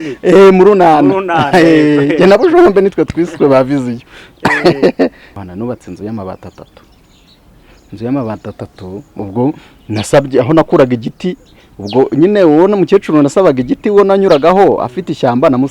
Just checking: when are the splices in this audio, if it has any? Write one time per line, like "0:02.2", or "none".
0:05.3